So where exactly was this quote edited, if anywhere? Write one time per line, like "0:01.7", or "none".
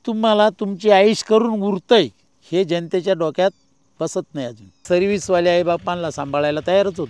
0:04.8